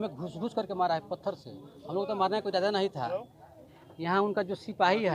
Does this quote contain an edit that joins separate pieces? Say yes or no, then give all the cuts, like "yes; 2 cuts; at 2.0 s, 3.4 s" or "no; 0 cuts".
no; 0 cuts